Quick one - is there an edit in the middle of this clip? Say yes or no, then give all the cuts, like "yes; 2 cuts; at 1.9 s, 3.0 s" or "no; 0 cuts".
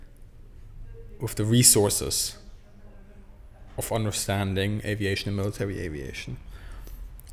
no; 0 cuts